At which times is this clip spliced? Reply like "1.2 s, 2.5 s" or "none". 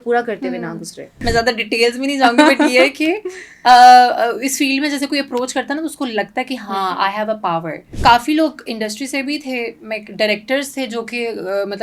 1.1 s, 7.9 s